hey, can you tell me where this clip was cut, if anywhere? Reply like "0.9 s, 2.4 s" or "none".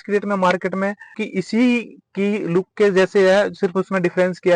1.2 s